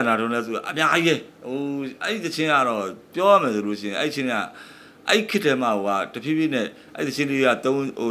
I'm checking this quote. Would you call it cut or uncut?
uncut